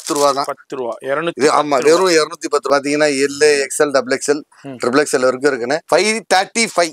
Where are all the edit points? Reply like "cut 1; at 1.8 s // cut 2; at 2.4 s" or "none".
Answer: cut 1; at 2.6 s // cut 2; at 5.8 s